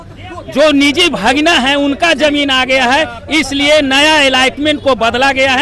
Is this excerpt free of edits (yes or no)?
yes